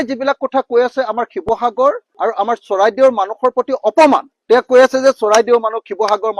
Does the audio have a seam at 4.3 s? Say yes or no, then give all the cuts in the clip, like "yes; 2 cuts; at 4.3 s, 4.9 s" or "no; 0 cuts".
no; 0 cuts